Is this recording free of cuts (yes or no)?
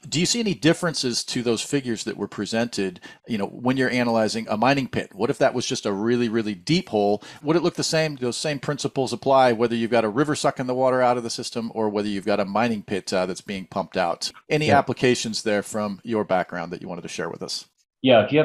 yes